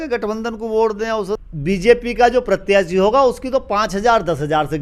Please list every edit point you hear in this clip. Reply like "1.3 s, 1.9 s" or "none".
1.4 s